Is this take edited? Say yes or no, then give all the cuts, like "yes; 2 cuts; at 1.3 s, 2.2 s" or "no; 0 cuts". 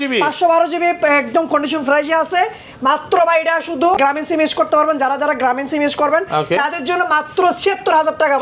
yes; 1 cut; at 3.9 s